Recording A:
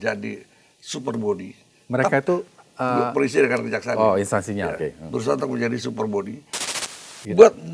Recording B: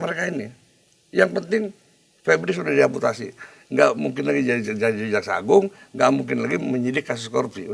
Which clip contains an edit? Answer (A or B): A